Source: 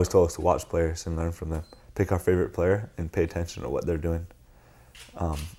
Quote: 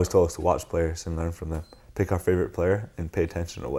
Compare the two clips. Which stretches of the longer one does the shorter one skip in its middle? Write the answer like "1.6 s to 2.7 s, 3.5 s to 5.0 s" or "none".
none